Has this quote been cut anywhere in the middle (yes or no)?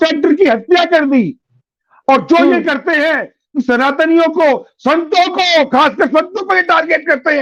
no